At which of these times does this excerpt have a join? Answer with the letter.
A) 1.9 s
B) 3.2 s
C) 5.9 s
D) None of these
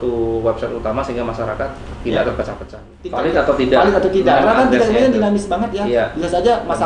B